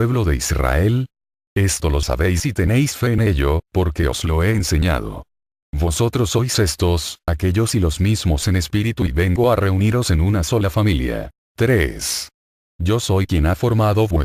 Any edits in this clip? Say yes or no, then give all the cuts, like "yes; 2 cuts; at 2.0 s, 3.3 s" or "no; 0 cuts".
yes; 1 cut; at 8.7 s